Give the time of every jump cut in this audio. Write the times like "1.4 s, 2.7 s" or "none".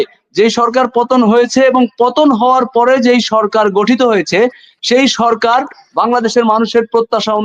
none